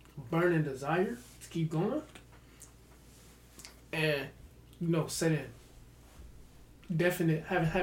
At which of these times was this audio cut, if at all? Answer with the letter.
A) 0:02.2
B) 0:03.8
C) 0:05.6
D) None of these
D